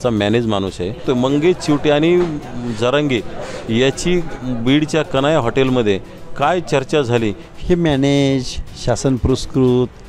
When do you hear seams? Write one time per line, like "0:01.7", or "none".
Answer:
0:01.0
0:07.5